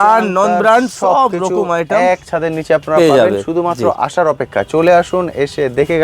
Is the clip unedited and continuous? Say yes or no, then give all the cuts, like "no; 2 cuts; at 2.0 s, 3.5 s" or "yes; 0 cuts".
yes; 0 cuts